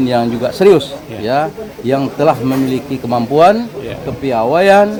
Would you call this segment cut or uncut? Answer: uncut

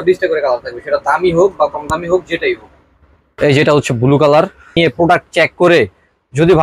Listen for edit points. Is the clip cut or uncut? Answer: cut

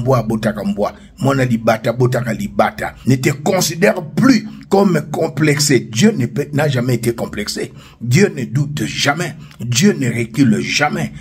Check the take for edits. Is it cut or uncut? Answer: cut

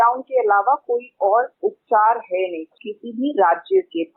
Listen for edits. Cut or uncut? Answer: cut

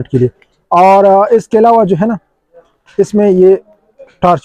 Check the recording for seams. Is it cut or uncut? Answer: uncut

